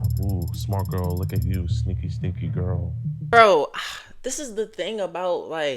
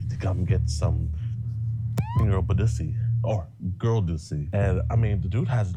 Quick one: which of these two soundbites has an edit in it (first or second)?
first